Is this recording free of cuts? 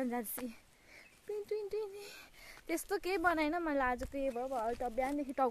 yes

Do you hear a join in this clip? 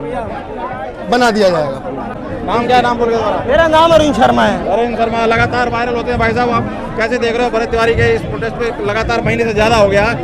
no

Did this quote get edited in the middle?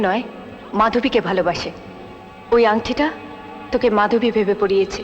no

